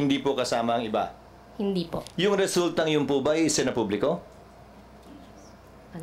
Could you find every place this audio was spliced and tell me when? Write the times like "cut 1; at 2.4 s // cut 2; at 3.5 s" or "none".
none